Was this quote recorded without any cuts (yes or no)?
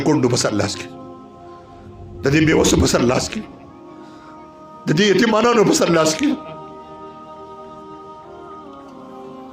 no